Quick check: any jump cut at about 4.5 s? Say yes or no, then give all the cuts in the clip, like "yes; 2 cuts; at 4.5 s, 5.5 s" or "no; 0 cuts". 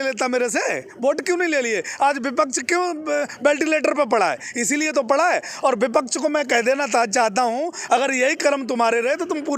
no; 0 cuts